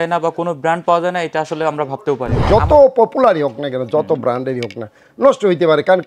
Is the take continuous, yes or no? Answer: no